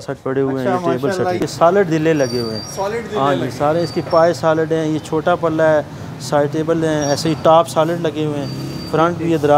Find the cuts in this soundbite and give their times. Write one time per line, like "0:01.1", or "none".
0:01.4